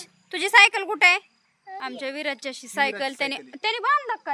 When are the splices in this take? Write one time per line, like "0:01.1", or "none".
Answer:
0:01.8